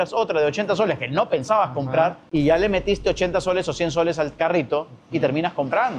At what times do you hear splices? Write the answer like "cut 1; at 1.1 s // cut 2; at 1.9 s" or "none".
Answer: cut 1; at 2.2 s